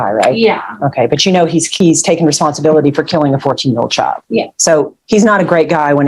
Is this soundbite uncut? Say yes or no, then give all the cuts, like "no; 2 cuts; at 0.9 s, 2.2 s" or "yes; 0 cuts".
no; 2 cuts; at 1.7 s, 4.5 s